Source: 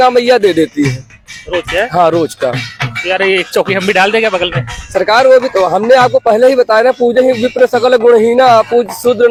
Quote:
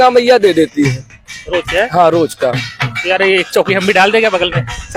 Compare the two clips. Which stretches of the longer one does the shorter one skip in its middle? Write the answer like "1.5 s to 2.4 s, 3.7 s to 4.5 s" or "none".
none